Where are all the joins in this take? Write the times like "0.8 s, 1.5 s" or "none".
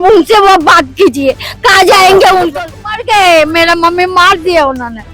2.6 s